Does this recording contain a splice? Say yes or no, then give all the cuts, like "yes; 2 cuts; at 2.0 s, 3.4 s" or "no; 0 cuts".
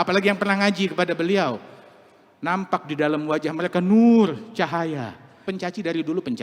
yes; 1 cut; at 5.3 s